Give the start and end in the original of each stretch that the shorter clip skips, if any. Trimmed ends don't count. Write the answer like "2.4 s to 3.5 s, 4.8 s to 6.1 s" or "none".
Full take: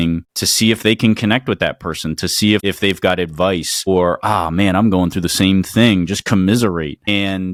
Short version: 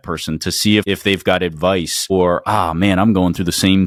none